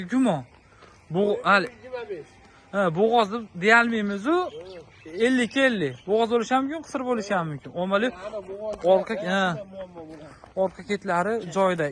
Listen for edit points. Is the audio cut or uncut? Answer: uncut